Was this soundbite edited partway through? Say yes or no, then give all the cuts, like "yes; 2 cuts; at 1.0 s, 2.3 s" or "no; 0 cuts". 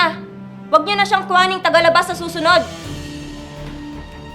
no; 0 cuts